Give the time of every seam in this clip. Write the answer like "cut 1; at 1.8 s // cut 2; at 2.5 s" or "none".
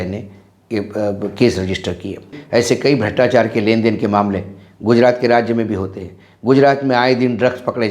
cut 1; at 2.4 s